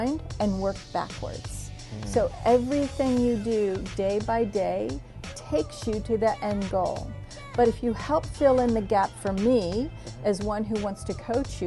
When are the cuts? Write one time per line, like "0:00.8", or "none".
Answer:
none